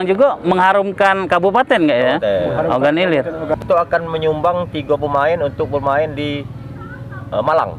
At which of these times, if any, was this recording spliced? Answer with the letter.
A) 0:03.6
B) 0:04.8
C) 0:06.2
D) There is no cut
A